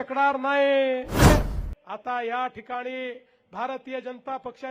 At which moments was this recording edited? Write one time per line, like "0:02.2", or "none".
0:01.3